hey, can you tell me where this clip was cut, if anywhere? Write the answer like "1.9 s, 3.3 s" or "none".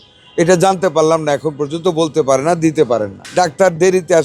3.2 s